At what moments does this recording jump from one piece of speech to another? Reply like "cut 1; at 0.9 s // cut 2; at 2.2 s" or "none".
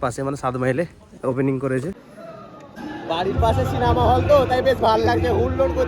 cut 1; at 2.1 s

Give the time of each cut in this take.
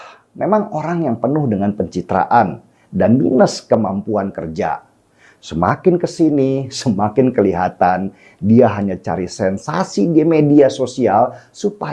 none

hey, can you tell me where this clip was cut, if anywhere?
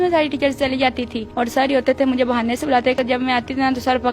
cut 1; at 1.5 s // cut 2; at 3.0 s

